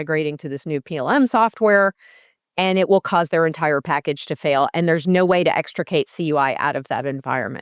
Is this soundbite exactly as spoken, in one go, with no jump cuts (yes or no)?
yes